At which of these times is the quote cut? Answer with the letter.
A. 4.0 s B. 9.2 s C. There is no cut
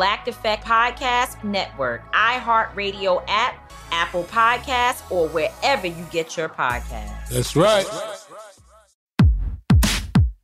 B